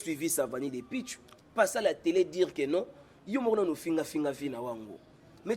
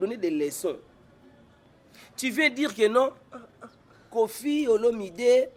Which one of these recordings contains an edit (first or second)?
first